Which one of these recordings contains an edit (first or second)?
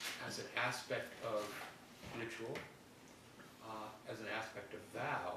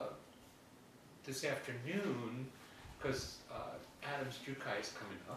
first